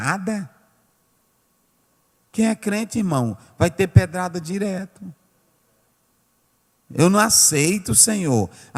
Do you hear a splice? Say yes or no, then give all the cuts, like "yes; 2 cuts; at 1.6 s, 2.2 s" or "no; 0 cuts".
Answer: no; 0 cuts